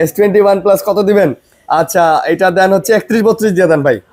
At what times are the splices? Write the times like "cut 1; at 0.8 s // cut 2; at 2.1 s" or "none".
none

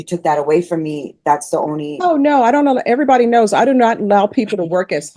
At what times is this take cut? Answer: none

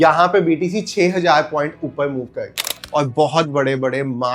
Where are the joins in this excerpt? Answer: cut 1; at 2.8 s

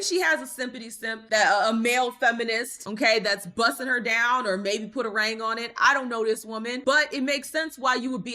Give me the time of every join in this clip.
cut 1; at 6.8 s

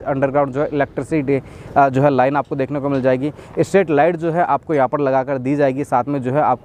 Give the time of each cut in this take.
none

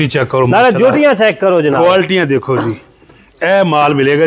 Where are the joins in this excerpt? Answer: none

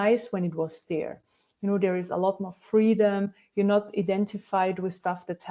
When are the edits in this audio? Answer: none

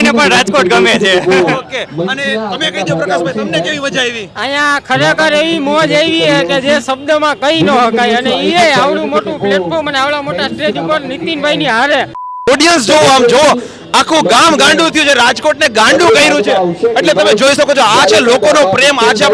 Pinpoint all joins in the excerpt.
cut 1; at 12.5 s

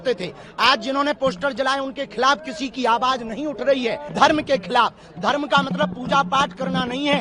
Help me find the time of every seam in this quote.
cut 1; at 4.0 s

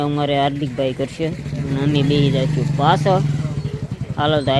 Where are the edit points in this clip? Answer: none

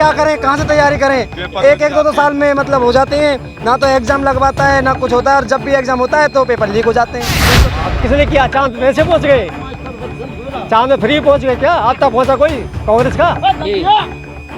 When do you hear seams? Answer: cut 1; at 7.5 s

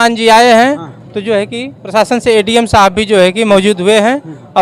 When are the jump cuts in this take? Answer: none

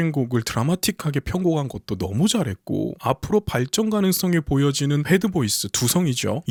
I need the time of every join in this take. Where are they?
none

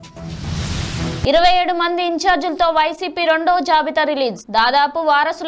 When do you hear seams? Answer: cut 1; at 1.2 s

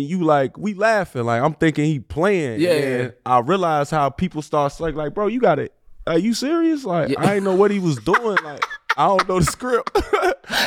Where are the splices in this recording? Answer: none

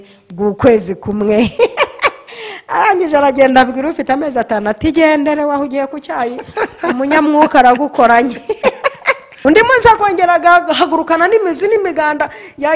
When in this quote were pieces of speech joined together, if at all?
cut 1; at 9.2 s

